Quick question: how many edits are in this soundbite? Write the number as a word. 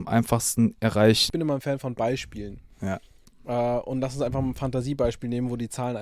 one